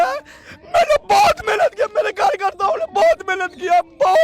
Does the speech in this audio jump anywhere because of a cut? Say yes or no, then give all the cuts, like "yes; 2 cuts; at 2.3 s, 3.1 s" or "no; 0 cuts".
no; 0 cuts